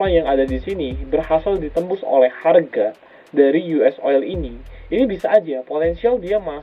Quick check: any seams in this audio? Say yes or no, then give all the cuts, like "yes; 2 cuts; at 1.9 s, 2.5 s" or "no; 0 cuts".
no; 0 cuts